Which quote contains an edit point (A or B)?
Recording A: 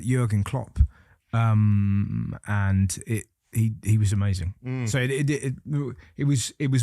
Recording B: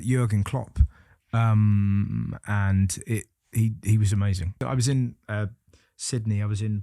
B